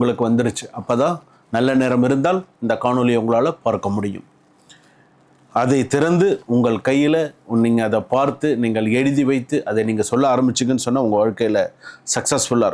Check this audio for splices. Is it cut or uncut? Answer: uncut